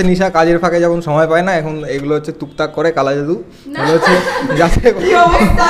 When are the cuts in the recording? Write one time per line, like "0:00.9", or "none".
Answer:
none